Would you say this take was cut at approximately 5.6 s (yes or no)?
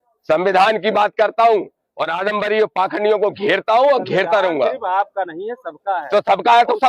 yes